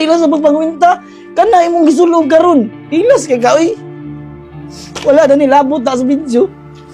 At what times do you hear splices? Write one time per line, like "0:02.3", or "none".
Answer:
none

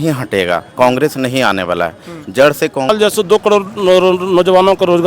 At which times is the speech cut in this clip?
0:02.9

